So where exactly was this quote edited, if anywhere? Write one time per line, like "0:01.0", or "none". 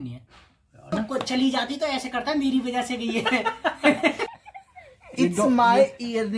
0:00.9
0:04.3